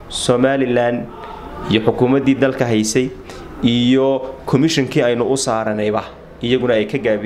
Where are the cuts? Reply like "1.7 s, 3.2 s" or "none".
none